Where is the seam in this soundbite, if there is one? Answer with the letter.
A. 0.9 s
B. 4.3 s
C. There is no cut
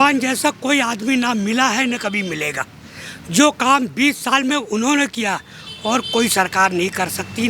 C